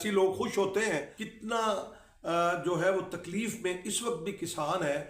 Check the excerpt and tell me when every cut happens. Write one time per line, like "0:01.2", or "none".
0:01.2